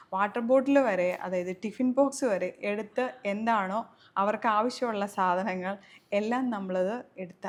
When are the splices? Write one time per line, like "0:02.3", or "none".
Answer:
none